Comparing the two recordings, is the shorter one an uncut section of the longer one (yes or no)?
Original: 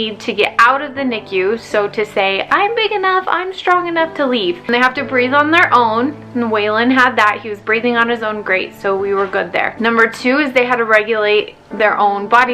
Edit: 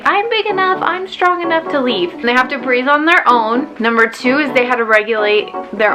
no